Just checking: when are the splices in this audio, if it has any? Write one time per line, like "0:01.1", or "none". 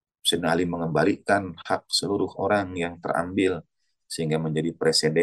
none